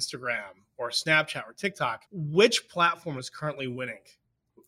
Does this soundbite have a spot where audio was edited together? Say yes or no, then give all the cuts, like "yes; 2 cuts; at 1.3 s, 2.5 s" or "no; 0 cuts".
yes; 1 cut; at 2.1 s